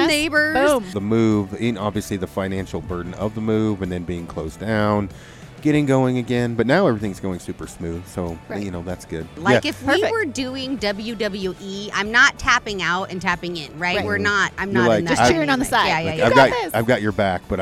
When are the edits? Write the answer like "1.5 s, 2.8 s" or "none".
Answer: 1.0 s, 9.3 s